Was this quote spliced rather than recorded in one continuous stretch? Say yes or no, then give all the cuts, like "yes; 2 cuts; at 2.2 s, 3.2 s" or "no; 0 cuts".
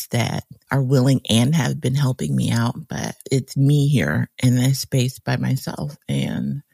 yes; 1 cut; at 3.2 s